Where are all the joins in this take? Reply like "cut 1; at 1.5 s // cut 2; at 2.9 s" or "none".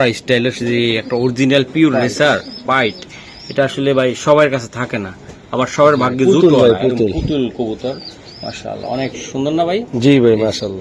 none